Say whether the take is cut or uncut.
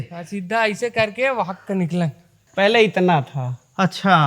cut